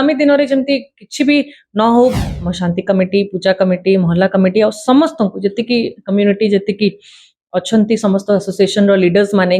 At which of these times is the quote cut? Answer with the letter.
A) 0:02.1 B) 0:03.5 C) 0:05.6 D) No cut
A